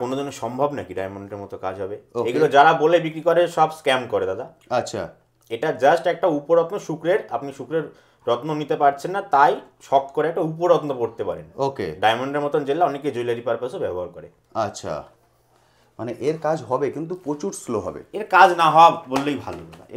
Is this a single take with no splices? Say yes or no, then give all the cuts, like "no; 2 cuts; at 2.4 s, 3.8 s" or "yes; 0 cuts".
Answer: yes; 0 cuts